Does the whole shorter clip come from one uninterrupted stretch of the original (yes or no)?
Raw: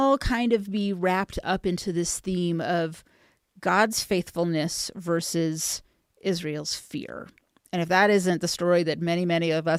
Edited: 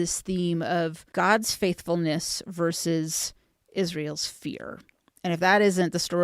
no